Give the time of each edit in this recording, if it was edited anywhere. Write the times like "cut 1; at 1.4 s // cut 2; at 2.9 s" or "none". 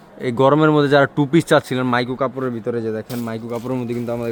none